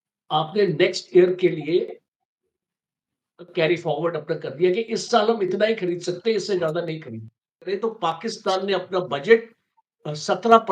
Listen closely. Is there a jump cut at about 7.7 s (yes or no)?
yes